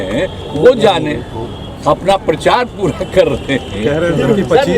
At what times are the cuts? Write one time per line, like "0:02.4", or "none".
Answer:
none